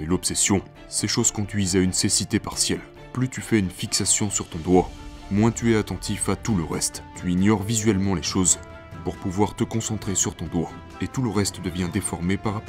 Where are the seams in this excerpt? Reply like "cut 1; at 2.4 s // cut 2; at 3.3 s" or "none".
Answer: none